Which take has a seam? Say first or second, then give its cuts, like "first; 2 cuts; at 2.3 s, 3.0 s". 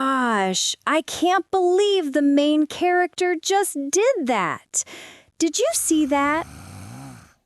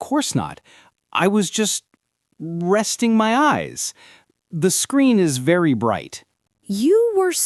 first; 1 cut; at 6.5 s